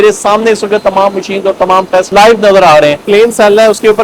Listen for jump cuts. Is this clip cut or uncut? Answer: cut